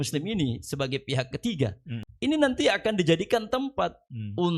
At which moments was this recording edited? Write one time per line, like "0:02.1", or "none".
0:02.0